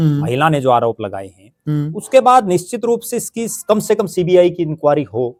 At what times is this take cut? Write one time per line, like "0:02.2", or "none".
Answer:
none